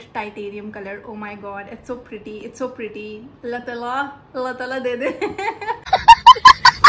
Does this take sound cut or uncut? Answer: uncut